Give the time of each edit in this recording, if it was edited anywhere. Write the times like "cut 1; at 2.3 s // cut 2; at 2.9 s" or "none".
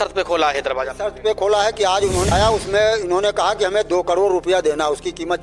cut 1; at 2.3 s